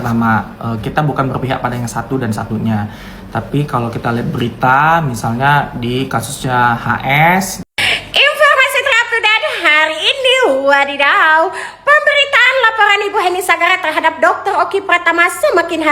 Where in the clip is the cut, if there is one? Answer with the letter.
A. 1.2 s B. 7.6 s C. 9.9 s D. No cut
B